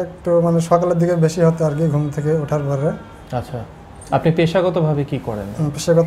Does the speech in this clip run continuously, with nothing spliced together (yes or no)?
yes